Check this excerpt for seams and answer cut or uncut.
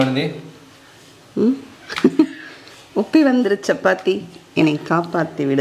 uncut